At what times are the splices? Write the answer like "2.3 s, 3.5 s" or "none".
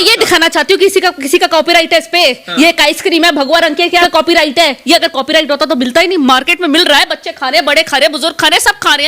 4.0 s